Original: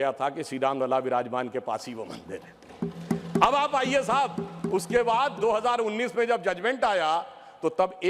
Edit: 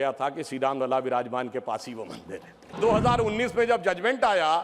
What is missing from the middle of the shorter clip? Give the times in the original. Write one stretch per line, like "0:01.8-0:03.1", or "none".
0:02.7-0:05.3

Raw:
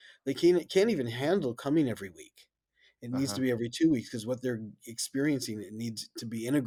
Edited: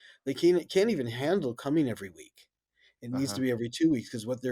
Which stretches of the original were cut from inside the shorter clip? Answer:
none

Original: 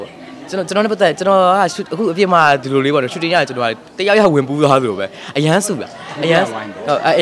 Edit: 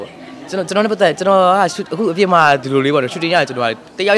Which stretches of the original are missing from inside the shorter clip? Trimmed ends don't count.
none

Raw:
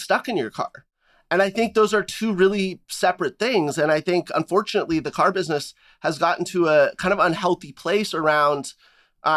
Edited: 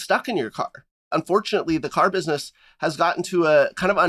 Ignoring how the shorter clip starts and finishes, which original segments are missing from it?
0:01.1-0:04.3

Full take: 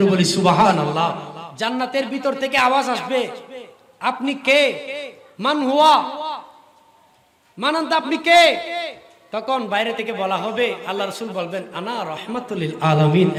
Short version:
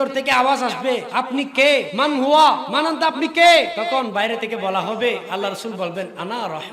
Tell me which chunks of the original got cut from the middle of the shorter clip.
0:03.3-0:04.0
0:04.8-0:05.4
0:06.1-0:07.6
0:08.7-0:09.4

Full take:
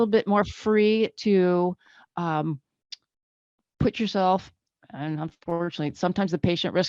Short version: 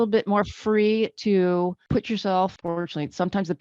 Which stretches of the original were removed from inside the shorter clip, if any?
0:01.8-0:03.7
0:04.5-0:05.4

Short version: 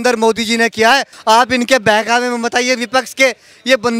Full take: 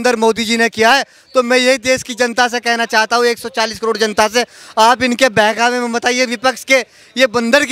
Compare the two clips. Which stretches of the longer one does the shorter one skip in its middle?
0:01.1-0:04.6

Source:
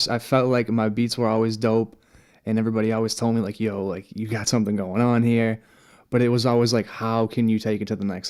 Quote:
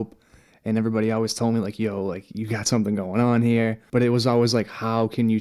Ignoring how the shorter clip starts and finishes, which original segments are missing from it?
0:05.6-0:06.0

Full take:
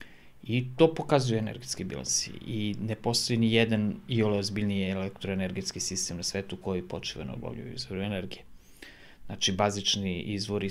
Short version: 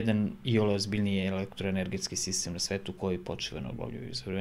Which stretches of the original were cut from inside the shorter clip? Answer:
none

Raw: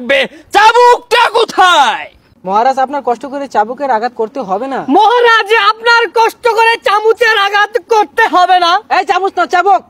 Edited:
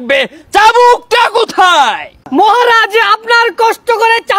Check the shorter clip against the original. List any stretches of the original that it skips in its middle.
0:02.2-0:04.7

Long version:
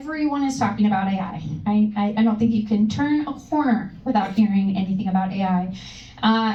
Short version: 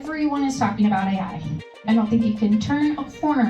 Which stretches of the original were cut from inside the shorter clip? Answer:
0:01.7-0:02.0

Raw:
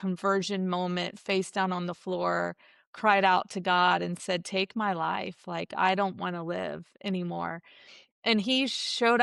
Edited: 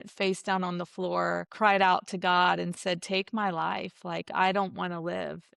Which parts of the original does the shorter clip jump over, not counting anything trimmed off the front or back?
0:02.6-0:02.9

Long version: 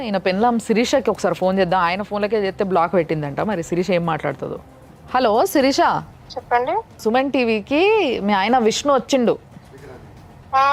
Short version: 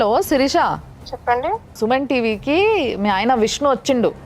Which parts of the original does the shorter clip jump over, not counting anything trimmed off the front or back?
none

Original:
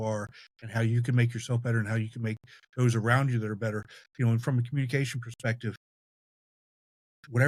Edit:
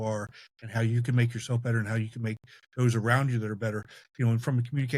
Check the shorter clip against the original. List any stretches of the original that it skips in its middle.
none

